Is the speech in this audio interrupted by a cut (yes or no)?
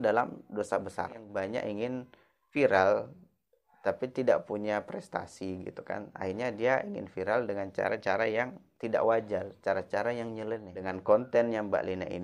yes